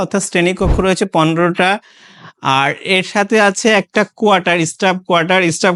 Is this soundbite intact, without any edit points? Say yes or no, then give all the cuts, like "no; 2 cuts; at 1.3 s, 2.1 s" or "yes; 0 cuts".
yes; 0 cuts